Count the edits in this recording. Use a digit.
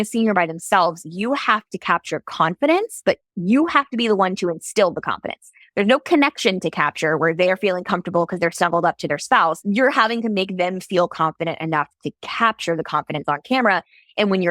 1